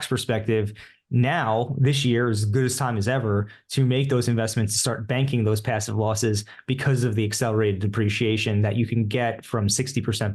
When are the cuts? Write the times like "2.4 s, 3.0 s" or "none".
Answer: none